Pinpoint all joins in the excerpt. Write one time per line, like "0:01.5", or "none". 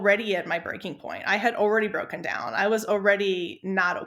none